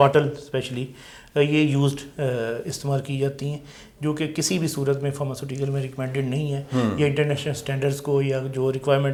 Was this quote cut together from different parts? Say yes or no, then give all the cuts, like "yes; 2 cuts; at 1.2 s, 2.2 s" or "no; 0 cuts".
no; 0 cuts